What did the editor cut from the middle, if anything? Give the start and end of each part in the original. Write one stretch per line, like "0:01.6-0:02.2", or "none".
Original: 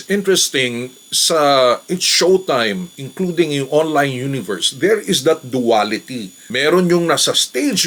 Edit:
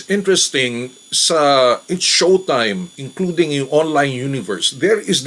none

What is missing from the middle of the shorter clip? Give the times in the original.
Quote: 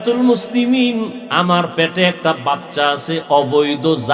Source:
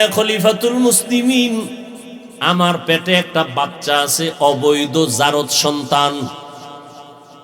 0:01.8-0:02.3

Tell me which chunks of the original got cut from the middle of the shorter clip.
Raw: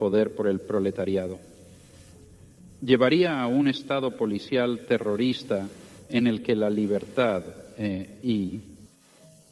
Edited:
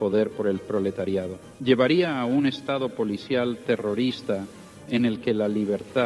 0:01.4-0:02.7

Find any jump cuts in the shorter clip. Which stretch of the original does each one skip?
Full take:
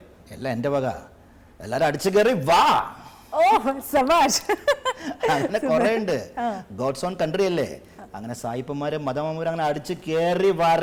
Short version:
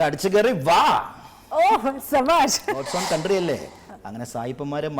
0:04.6-0:06.8

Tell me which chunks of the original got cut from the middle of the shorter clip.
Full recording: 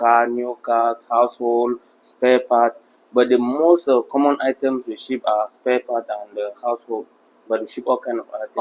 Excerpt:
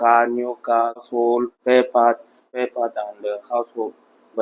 0:01.1-0:01.7
0:03.0-0:05.6

